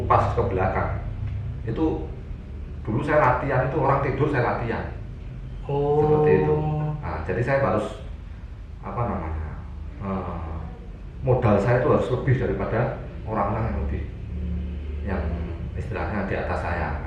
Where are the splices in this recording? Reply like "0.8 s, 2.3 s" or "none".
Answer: none